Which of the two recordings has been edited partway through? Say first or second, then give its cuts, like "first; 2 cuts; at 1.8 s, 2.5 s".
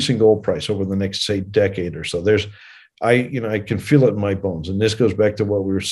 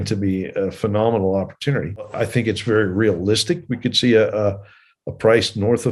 second; 1 cut; at 2.1 s